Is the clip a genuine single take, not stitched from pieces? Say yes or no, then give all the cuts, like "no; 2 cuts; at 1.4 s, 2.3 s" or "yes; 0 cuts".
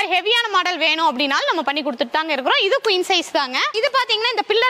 yes; 0 cuts